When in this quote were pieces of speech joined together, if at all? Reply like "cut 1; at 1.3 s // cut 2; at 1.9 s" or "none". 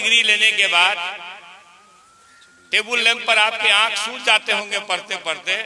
none